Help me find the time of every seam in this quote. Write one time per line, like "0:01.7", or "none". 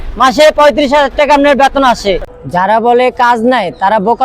0:02.2